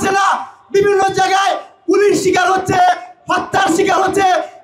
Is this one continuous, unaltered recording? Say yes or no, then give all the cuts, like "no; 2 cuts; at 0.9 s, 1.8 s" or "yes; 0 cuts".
yes; 0 cuts